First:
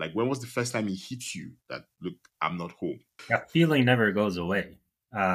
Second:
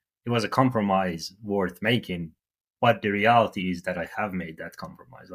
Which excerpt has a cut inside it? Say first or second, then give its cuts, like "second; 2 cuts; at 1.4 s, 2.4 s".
first; 1 cut; at 3.1 s